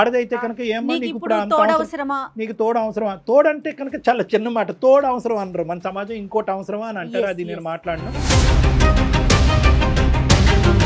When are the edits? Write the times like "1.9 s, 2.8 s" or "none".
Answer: none